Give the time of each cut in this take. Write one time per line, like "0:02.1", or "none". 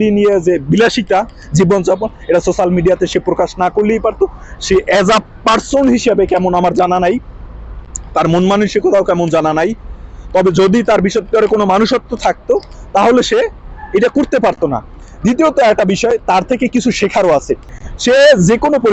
none